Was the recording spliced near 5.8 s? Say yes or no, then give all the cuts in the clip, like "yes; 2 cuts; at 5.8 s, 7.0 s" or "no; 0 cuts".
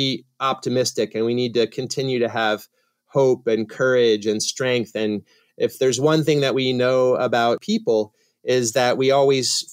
no; 1 cut; at 7.6 s